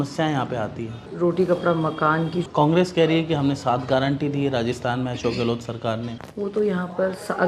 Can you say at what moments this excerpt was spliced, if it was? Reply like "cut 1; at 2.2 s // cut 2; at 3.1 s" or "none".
cut 1; at 1.1 s // cut 2; at 2.5 s // cut 3; at 6.2 s